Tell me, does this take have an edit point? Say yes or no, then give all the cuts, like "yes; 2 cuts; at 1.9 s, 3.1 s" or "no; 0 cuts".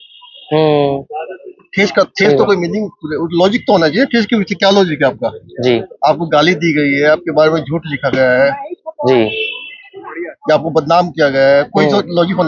no; 0 cuts